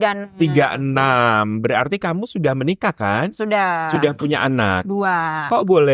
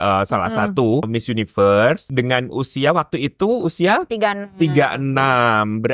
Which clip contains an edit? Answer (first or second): second